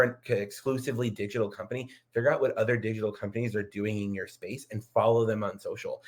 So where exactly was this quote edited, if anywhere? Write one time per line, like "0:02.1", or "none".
none